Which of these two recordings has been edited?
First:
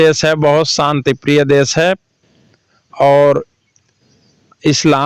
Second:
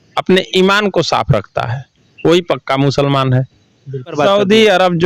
second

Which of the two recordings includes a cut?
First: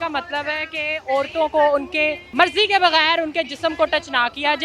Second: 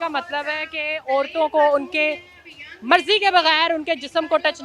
first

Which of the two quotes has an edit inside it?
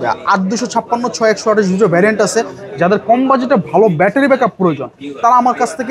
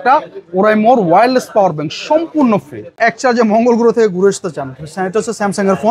second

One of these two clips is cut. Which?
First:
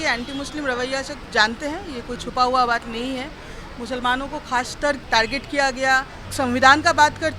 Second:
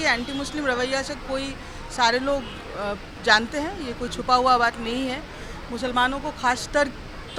first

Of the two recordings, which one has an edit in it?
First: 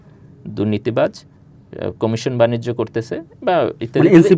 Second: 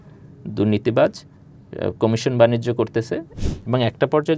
second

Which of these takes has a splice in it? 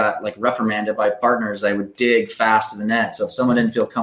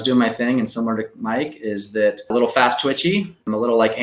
second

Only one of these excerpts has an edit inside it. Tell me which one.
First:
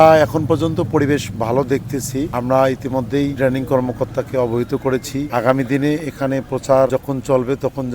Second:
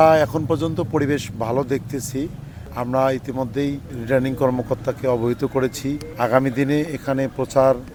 first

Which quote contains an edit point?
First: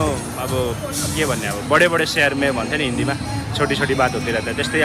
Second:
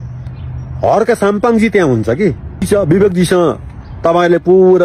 second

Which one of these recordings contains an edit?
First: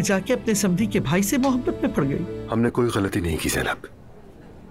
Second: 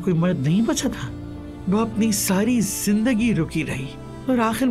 first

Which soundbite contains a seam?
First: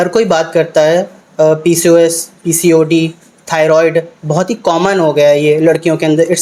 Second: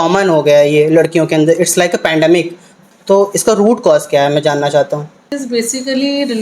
second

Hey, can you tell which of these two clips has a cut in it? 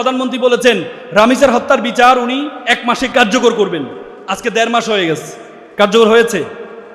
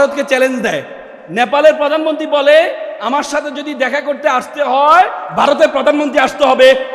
first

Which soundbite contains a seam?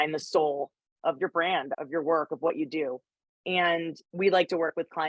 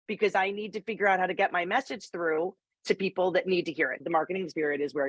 second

